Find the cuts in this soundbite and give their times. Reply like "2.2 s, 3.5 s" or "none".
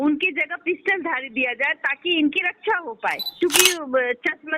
3.3 s